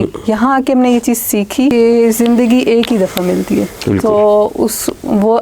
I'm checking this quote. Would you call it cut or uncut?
cut